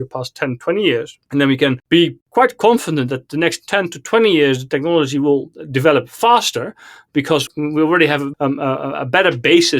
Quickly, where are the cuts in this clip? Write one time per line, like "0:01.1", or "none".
0:01.8